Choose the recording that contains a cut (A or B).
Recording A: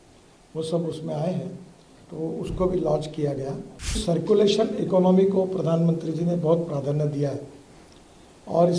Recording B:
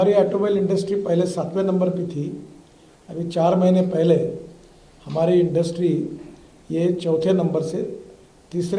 A